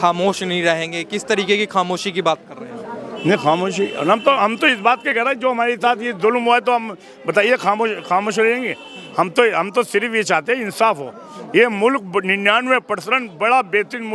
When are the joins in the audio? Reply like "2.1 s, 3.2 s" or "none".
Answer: none